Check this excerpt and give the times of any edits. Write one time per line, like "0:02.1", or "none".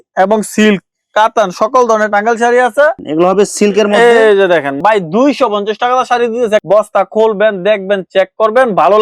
0:03.0
0:06.6